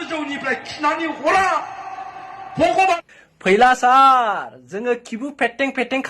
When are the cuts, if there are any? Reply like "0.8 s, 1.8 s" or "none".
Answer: 3.1 s